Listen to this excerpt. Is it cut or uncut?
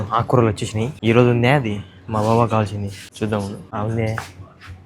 cut